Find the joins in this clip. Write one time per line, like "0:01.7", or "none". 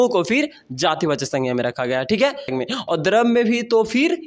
0:02.5